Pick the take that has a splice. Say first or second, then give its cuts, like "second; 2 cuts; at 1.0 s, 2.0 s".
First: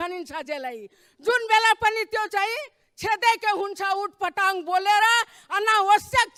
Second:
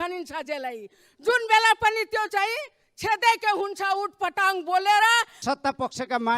second; 1 cut; at 5.4 s